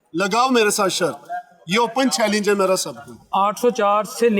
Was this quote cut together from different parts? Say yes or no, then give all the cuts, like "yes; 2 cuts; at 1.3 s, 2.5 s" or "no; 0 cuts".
yes; 1 cut; at 3.2 s